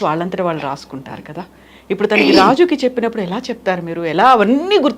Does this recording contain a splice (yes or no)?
no